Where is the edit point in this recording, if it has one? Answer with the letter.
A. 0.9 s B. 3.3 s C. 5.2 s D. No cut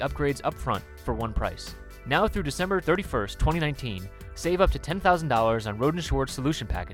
A